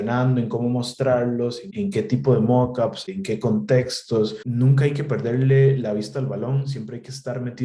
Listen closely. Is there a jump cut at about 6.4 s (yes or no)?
no